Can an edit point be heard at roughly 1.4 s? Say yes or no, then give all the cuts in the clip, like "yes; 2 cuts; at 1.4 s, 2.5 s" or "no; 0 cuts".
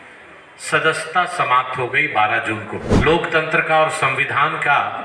no; 1 cut; at 2.8 s